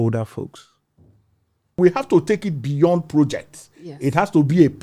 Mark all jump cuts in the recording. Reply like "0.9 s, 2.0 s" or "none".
1.8 s